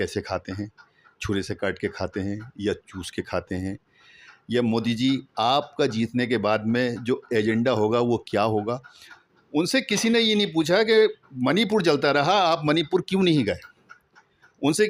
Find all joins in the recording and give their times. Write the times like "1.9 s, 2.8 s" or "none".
none